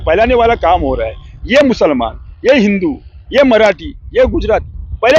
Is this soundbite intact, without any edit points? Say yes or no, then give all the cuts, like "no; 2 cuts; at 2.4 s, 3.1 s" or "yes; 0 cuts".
yes; 0 cuts